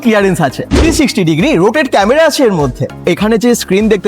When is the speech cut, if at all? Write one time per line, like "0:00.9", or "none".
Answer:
0:03.0